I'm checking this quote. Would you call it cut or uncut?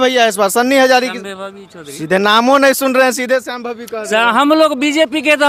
uncut